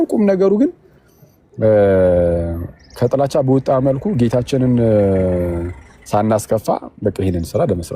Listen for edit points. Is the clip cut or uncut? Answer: uncut